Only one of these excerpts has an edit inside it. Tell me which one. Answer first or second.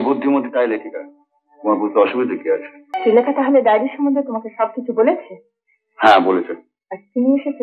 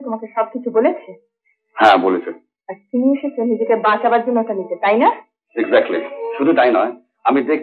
first